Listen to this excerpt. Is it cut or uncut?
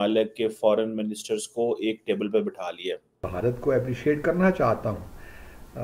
cut